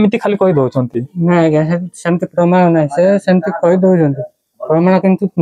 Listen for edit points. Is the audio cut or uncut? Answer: uncut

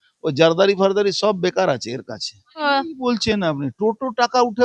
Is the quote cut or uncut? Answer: cut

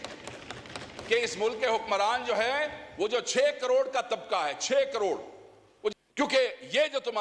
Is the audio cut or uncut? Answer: cut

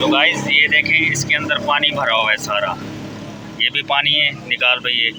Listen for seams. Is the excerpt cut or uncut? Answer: uncut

